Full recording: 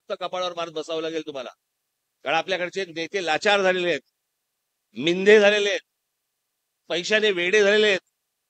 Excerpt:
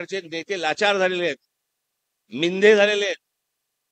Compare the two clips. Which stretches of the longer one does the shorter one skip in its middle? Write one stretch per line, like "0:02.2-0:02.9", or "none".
none